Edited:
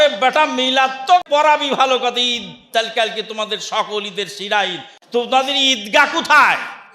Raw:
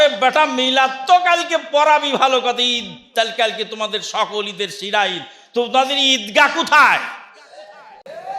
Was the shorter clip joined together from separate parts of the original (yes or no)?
yes